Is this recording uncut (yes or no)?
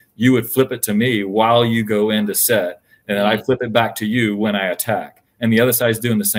yes